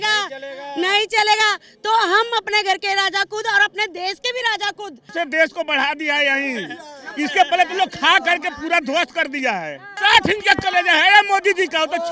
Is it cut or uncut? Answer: cut